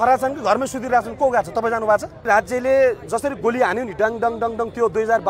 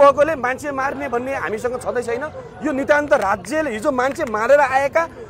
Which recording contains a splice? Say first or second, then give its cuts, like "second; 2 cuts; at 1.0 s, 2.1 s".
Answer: first; 1 cut; at 2.2 s